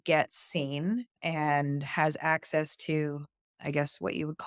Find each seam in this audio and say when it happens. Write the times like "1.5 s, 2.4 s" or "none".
1.1 s